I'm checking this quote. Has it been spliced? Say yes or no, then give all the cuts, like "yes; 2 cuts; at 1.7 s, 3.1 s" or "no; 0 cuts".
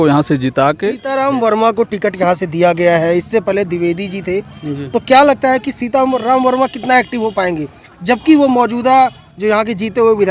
yes; 1 cut; at 1.1 s